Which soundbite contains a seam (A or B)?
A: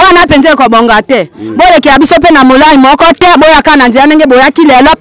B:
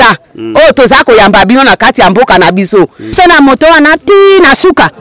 B